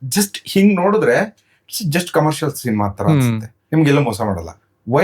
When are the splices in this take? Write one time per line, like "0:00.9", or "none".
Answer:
0:03.5